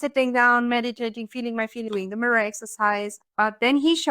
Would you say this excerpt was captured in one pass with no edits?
no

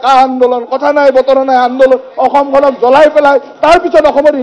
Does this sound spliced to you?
no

